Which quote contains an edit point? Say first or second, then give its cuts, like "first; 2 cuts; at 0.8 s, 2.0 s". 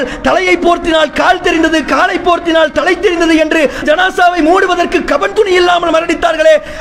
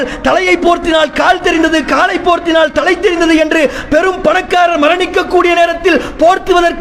first; 1 cut; at 3.8 s